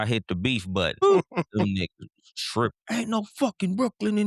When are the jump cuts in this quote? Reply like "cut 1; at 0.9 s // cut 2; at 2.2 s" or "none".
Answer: cut 1; at 1.0 s